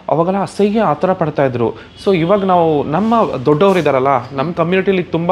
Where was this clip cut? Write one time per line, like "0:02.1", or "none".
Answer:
none